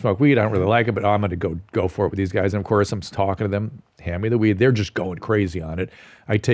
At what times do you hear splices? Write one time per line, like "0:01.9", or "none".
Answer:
none